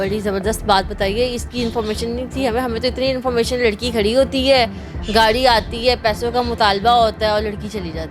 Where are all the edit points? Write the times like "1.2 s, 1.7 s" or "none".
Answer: none